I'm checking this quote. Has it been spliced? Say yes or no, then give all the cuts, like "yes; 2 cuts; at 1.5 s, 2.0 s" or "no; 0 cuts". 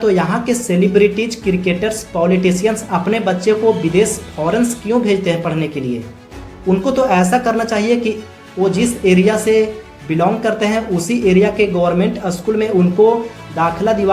no; 0 cuts